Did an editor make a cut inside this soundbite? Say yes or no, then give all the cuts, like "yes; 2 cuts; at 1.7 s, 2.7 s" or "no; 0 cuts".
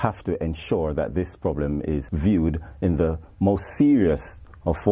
yes; 1 cut; at 2.1 s